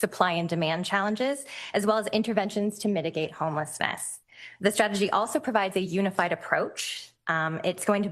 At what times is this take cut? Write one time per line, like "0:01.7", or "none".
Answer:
none